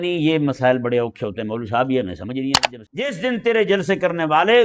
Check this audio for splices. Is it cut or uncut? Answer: cut